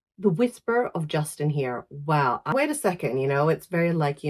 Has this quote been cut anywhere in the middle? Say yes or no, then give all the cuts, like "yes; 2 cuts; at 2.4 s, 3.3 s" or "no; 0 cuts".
yes; 1 cut; at 2.5 s